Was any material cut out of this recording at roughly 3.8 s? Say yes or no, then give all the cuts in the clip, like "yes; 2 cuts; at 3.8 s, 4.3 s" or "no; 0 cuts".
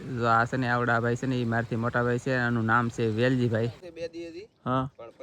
yes; 1 cut; at 3.8 s